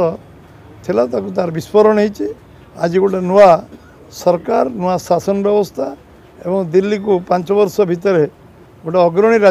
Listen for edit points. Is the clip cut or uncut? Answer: uncut